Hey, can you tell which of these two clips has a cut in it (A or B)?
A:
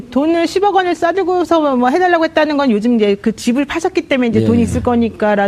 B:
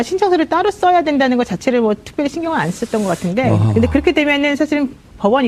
A